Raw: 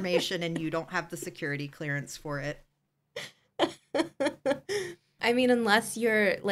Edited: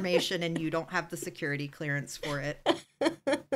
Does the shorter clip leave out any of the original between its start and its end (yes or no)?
yes